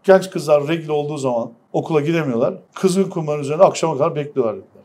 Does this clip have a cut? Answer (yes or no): yes